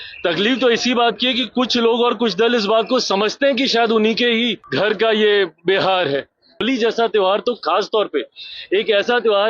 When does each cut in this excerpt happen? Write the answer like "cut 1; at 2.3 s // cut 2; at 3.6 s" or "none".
cut 1; at 4.6 s // cut 2; at 6.6 s